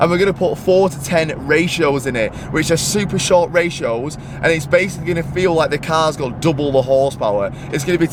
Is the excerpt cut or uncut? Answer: uncut